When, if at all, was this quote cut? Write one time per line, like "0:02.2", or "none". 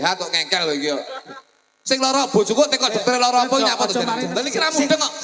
0:04.3